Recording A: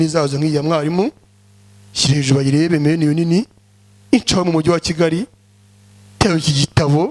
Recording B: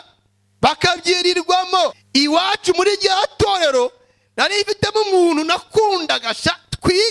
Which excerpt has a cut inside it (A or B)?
B